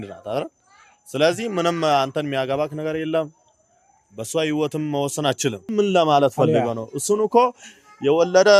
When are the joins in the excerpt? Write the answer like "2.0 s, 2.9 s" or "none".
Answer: 5.7 s

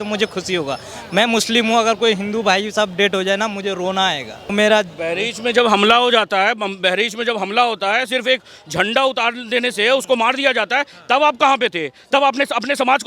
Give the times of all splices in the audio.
4.4 s

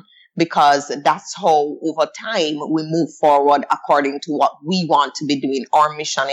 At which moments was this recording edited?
none

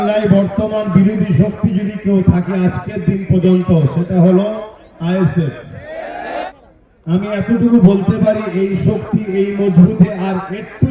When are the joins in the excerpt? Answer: 6.5 s

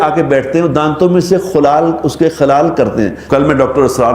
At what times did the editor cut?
3.2 s

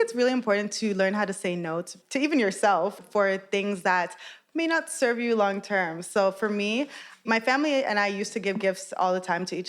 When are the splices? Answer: 1.9 s

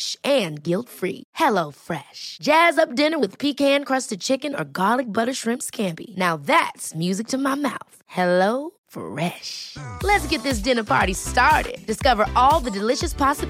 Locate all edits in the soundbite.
none

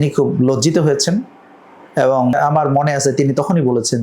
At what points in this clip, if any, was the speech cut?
2.3 s

